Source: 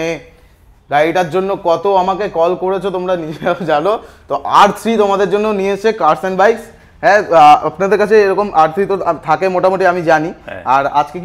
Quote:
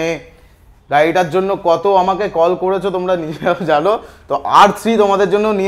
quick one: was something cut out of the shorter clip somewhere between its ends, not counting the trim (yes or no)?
no